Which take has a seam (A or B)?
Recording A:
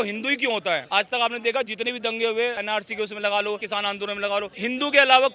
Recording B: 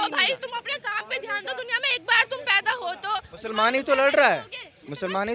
A